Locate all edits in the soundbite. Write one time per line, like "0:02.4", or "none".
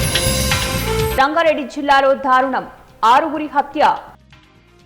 0:01.1

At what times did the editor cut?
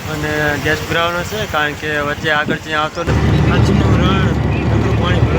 0:03.1

